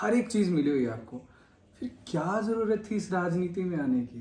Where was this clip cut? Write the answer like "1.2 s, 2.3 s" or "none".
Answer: none